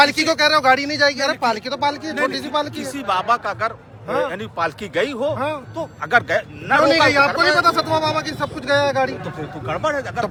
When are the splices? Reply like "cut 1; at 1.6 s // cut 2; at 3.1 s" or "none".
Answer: none

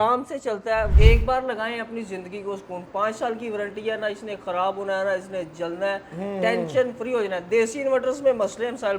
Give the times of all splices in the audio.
cut 1; at 0.9 s

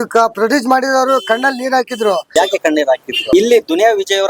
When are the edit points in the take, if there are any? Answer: cut 1; at 2.3 s // cut 2; at 3.1 s

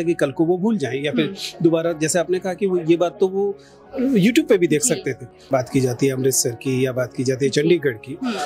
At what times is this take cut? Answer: cut 1; at 5.4 s

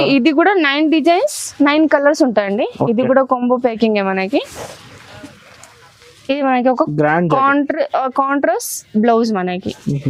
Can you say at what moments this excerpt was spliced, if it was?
none

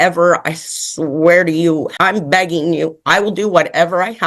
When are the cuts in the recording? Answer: cut 1; at 1.9 s

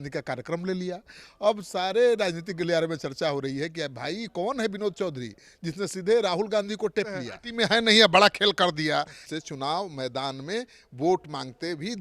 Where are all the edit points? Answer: cut 1; at 7.4 s // cut 2; at 9.2 s

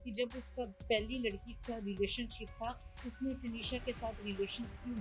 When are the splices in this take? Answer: none

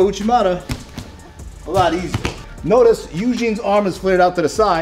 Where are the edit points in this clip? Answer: cut 1; at 2.5 s

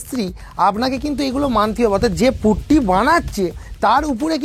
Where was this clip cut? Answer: none

